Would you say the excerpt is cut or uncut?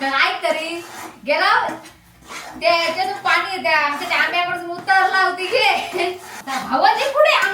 cut